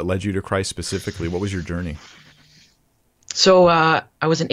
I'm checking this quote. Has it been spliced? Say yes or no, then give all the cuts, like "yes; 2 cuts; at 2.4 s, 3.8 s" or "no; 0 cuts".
no; 0 cuts